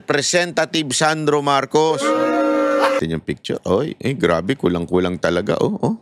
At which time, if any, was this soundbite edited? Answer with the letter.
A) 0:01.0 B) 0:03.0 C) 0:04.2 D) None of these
B